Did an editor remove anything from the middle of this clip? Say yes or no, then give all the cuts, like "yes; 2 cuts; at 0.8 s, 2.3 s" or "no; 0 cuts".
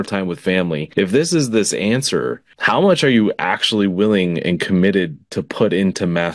yes; 2 cuts; at 0.9 s, 2.5 s